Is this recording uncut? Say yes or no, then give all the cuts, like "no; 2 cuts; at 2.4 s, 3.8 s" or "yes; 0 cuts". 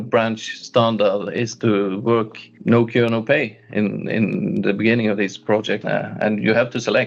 yes; 0 cuts